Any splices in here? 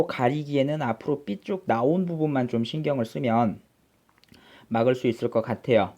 yes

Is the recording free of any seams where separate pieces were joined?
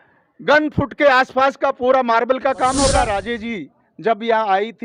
no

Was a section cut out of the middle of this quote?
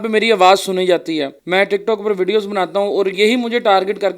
yes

